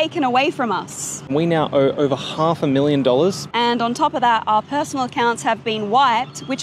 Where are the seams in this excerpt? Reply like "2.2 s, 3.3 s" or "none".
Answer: 1.2 s, 3.4 s